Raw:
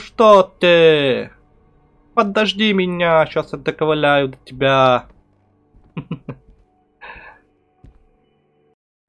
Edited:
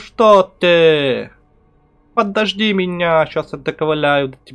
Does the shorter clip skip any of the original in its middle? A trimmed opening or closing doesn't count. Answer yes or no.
no